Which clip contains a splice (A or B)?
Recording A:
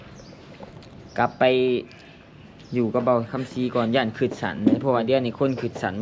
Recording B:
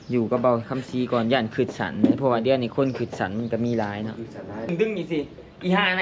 B